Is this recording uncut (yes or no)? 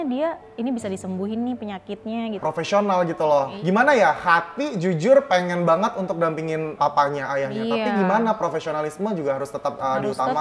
no